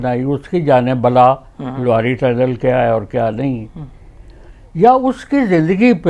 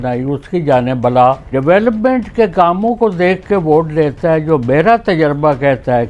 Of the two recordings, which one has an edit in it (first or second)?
second